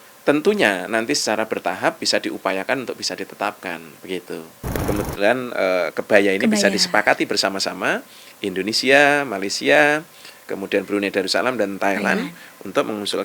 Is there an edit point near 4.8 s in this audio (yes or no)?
yes